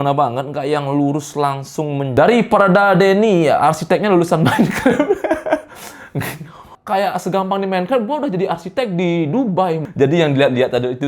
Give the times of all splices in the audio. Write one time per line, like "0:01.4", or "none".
0:02.1
0:06.7
0:09.8